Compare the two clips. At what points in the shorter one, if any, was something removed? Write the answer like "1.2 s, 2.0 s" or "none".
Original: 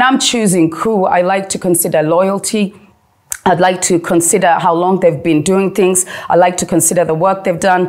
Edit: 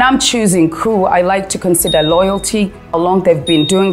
3.0 s